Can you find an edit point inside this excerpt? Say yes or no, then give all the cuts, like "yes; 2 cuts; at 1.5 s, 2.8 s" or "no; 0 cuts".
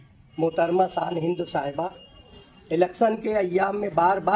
no; 0 cuts